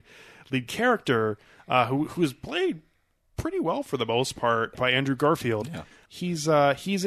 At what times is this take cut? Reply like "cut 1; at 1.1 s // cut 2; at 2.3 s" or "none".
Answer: cut 1; at 4.8 s // cut 2; at 6.0 s